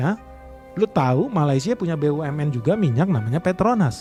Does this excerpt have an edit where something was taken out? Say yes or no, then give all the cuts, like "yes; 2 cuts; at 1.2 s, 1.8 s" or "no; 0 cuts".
no; 0 cuts